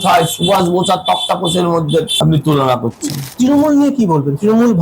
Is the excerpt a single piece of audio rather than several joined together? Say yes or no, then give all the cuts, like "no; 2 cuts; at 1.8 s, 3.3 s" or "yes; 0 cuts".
no; 2 cuts; at 2.1 s, 3.3 s